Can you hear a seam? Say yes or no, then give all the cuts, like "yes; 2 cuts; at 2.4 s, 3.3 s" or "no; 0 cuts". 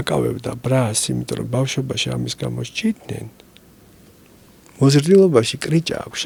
no; 0 cuts